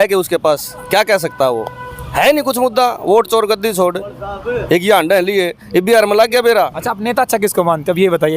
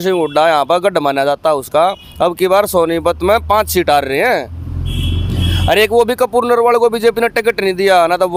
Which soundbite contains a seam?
first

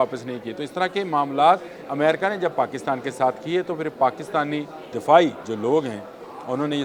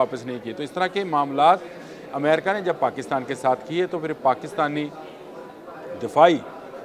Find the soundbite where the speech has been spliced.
first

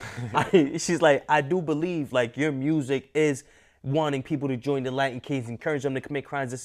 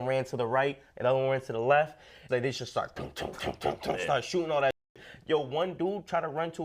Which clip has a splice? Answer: second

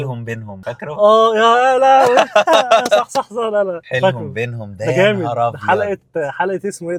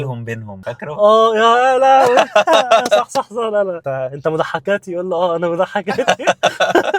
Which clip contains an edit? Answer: second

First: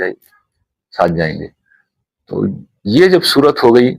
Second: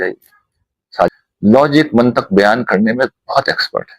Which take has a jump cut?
second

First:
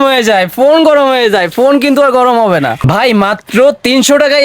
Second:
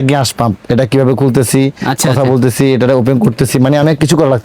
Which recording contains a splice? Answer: first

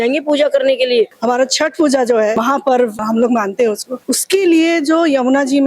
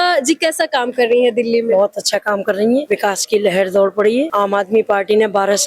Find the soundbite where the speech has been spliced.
first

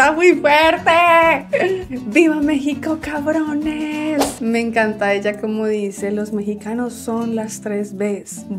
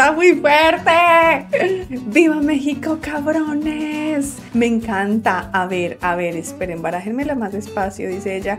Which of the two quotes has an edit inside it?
first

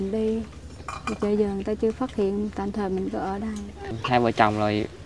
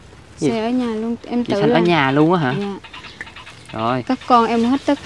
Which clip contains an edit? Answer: first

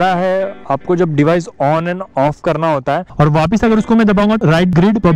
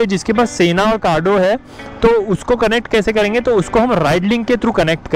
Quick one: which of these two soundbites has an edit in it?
first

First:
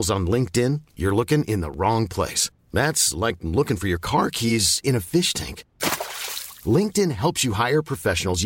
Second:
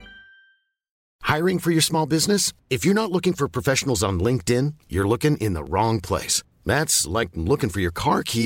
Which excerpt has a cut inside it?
second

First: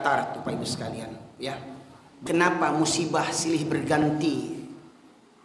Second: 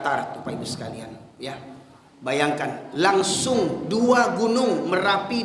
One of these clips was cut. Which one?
first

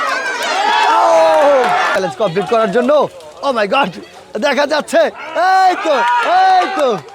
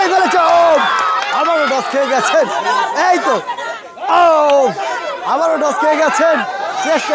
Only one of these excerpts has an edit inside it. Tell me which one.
first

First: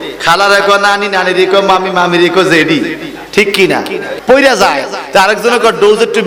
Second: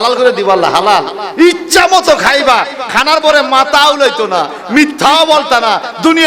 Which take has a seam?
first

